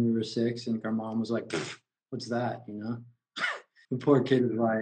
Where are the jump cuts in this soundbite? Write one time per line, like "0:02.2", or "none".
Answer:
0:03.9